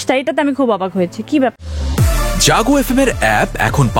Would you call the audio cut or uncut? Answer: cut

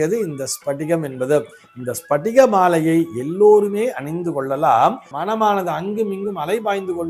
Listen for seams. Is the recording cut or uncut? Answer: cut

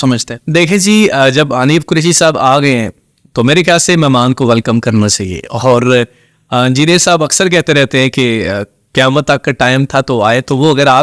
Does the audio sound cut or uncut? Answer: uncut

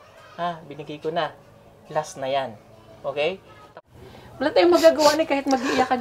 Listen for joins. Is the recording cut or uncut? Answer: cut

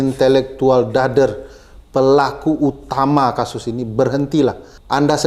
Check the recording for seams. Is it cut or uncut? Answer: uncut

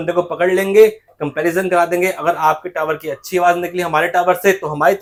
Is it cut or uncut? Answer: uncut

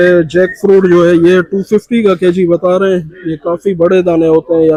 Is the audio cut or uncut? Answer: uncut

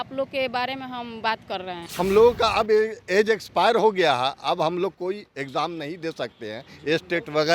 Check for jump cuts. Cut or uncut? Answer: cut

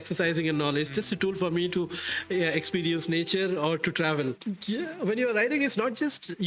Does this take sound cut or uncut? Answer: cut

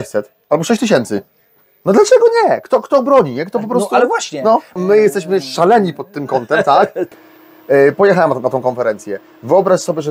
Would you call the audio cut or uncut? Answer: cut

